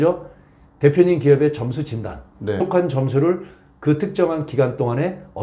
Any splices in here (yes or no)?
yes